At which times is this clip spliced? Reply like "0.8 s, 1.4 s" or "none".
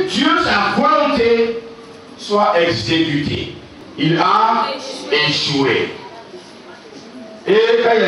3.8 s